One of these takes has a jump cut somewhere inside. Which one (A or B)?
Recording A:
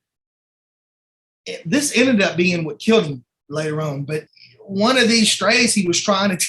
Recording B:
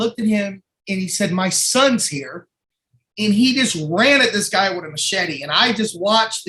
A